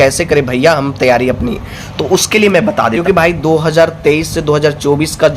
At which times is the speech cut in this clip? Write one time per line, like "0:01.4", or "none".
0:03.0

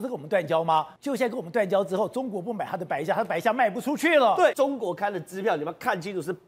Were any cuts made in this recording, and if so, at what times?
0:00.9
0:04.5

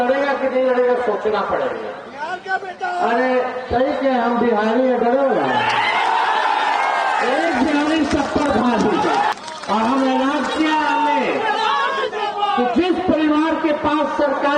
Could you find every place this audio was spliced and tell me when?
0:09.3

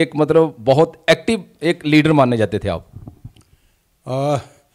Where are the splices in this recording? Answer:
none

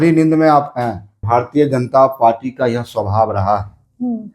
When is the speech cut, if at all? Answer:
0:01.2

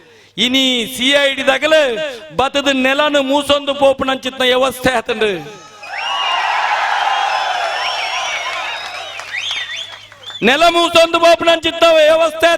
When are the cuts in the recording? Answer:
none

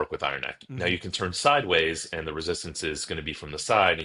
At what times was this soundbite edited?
none

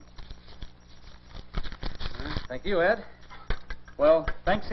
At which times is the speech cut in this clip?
none

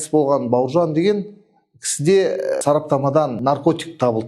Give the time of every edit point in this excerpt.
0:02.6
0:03.4

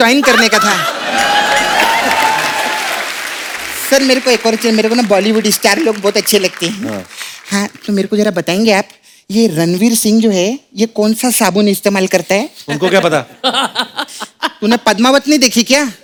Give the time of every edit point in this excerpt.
none

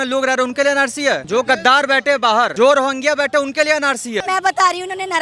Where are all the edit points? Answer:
0:01.2
0:02.5
0:04.2

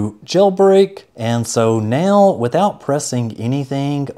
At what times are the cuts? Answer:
0:01.1

